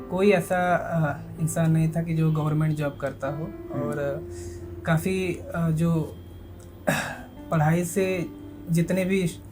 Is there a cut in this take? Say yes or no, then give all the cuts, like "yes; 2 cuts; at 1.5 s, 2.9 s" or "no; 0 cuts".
no; 0 cuts